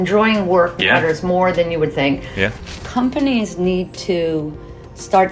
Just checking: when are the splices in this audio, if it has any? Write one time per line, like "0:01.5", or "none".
0:02.7